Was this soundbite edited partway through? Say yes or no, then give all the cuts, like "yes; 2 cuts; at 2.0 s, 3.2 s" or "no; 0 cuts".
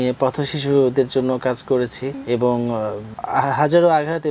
yes; 2 cuts; at 2.1 s, 3.1 s